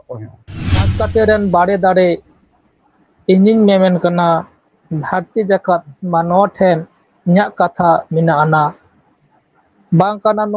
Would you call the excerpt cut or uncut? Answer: cut